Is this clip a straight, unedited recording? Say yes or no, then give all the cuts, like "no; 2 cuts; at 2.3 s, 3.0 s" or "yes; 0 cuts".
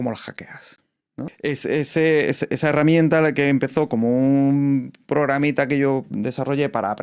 no; 1 cut; at 1.1 s